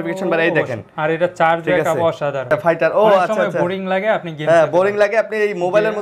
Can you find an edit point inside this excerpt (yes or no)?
yes